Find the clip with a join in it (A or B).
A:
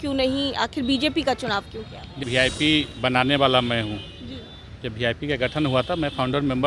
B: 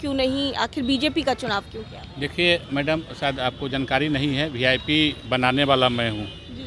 A